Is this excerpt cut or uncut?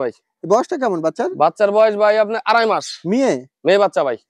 uncut